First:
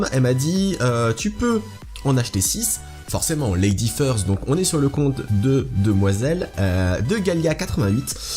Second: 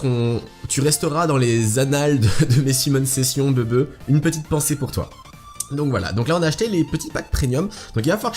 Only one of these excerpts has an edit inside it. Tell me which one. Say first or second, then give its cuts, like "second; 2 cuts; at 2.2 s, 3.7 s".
second; 1 cut; at 1.7 s